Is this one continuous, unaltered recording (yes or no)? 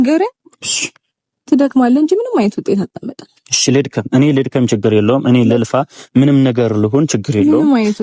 yes